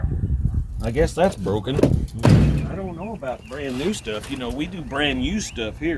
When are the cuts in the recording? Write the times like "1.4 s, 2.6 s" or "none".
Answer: 2.3 s